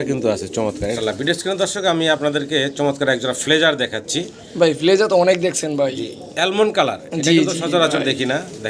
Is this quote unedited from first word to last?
no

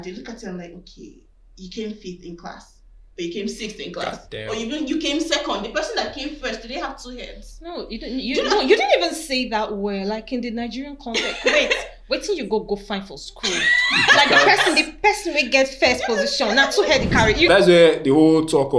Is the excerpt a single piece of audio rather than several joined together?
no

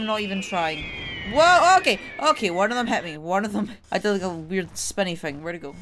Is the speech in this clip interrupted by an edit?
no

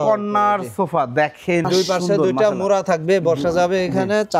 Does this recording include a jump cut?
yes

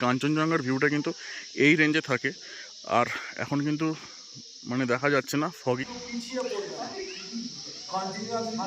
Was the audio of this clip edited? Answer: yes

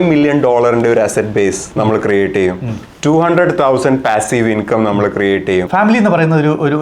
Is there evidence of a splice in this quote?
yes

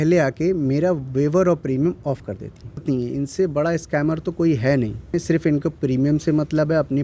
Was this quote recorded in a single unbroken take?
no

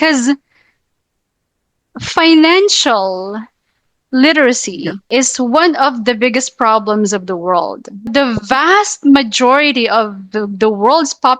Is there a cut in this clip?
yes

